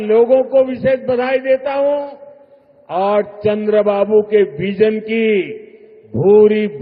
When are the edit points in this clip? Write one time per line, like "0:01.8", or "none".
none